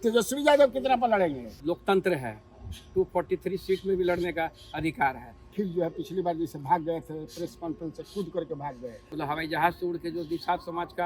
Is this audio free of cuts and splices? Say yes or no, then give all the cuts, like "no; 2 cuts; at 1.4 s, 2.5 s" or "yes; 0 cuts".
no; 3 cuts; at 1.5 s, 5.4 s, 9.0 s